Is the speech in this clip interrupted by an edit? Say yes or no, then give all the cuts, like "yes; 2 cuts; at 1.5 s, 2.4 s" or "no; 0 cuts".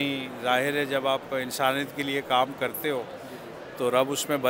no; 0 cuts